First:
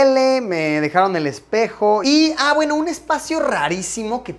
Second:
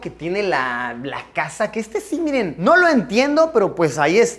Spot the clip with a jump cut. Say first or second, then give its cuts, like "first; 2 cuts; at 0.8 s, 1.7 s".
first; 1 cut; at 2.0 s